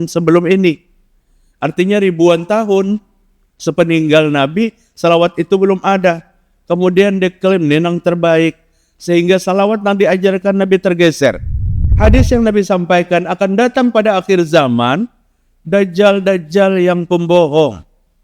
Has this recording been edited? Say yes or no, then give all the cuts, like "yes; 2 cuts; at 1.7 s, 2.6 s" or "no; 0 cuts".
yes; 1 cut; at 11.9 s